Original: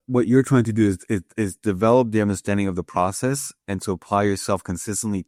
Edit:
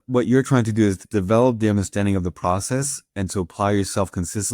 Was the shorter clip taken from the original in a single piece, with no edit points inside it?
no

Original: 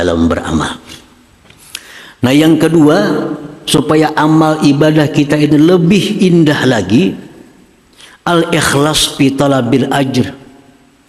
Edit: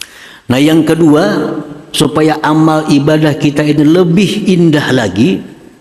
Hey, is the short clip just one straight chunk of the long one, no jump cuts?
yes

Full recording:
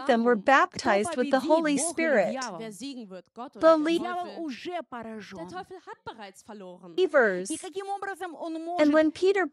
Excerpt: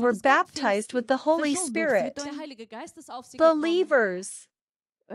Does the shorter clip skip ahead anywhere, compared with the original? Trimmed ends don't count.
yes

